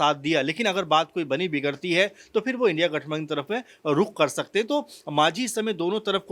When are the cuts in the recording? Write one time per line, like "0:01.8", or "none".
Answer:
none

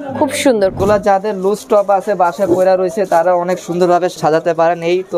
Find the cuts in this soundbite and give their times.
0:00.8
0:04.1

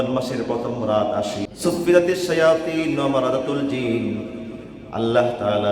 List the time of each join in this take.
0:01.5

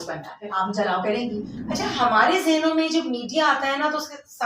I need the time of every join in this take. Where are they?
0:01.5

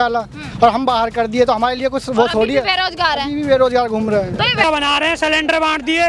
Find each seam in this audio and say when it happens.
0:04.6

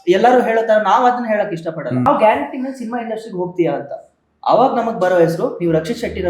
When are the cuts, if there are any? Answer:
0:02.1

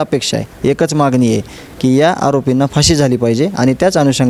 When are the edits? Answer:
none

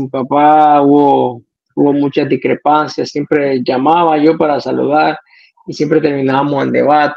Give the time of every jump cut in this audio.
none

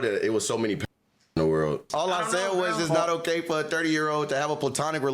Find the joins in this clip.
0:01.9

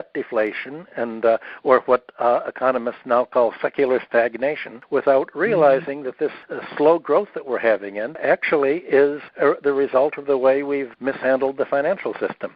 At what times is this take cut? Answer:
0:04.7
0:06.4
0:08.2
0:09.2
0:10.9

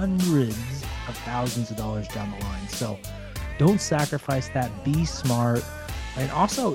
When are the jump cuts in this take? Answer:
none

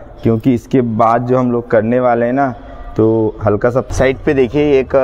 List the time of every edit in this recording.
0:03.9

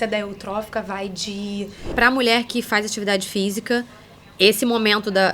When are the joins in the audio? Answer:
0:01.9

